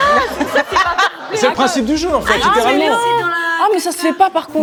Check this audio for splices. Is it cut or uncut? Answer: uncut